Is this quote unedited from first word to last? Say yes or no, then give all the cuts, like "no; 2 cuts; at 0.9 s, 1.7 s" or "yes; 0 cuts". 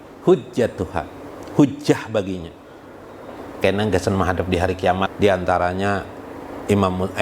no; 1 cut; at 5.1 s